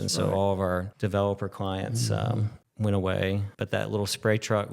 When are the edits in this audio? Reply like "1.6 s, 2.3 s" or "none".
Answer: 0.9 s, 2.6 s, 3.5 s